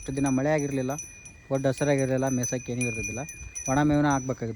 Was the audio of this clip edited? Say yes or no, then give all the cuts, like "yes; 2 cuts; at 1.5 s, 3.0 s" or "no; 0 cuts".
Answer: no; 0 cuts